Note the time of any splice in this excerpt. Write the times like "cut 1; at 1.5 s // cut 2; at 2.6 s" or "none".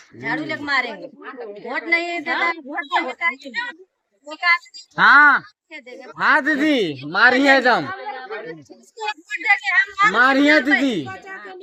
none